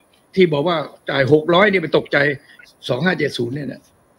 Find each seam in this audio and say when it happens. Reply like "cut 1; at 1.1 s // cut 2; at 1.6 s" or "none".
cut 1; at 2.5 s